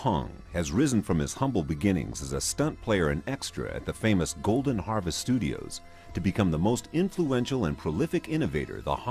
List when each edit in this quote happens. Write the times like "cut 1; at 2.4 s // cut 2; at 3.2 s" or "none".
cut 1; at 4.5 s